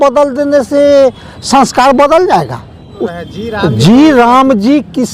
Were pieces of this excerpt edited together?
yes; 1 cut; at 2.9 s

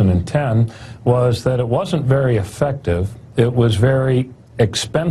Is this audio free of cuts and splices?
yes; 0 cuts

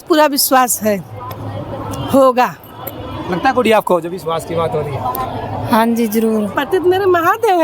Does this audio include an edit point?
yes; 1 cut; at 6.6 s

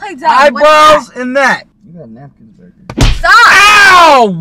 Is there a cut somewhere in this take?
yes; 1 cut; at 1.7 s

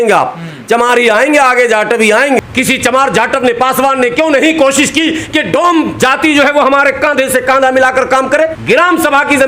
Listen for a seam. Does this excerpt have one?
yes; 2 cuts; at 2.4 s, 8.6 s

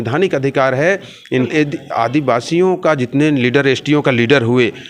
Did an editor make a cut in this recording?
yes; 1 cut; at 1.5 s

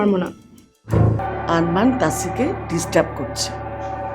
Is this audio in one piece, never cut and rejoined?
no; 1 cut; at 1.2 s

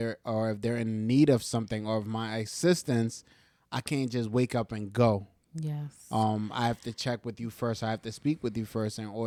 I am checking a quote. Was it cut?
no; 0 cuts

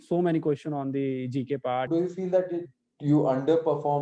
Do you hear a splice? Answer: yes; 1 cut; at 1.9 s

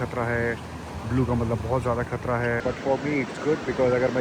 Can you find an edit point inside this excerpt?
yes; 1 cut; at 2.6 s

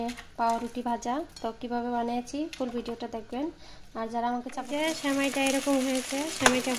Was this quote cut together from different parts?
yes; 1 cut; at 4.6 s

